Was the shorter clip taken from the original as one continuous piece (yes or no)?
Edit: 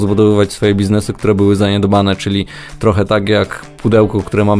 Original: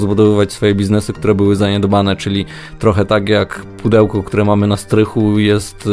yes